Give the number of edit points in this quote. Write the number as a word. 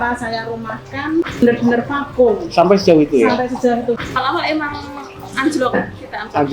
two